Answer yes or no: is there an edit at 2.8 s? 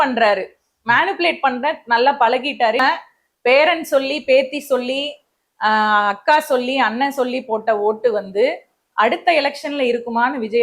yes